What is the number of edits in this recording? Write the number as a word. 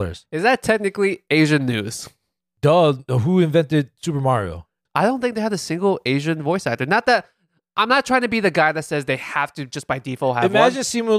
one